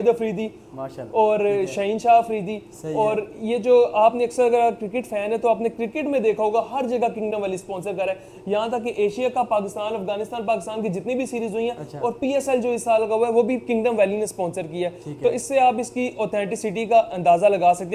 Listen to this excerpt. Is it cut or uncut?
uncut